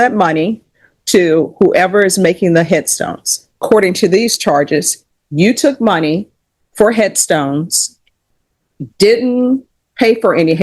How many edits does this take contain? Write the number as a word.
one